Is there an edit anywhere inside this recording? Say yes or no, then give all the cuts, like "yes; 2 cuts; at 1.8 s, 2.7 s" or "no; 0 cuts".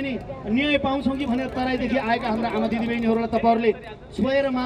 no; 0 cuts